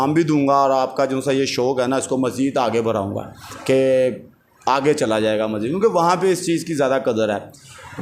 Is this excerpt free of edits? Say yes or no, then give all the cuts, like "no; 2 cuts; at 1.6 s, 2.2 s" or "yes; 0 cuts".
yes; 0 cuts